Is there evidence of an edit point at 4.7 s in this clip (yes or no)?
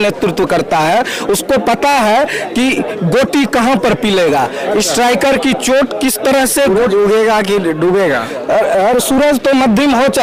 no